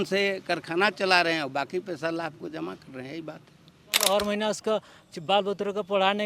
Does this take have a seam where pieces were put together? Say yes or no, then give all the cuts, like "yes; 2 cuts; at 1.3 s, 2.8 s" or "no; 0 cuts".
yes; 1 cut; at 4.0 s